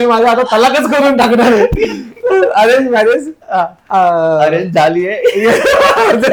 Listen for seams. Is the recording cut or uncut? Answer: uncut